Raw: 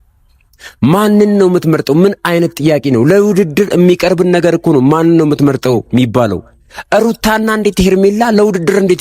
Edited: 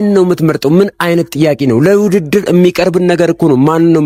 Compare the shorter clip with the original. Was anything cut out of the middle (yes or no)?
no